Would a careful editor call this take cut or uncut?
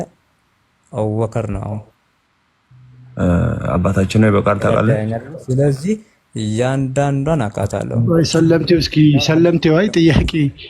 uncut